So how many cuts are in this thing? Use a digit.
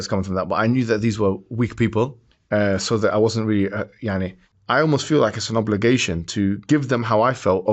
1